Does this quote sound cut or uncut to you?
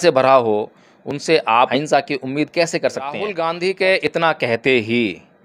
cut